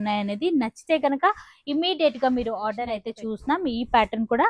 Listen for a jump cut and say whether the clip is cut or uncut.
cut